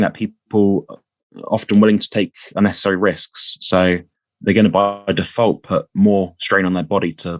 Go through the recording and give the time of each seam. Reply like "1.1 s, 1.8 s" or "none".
none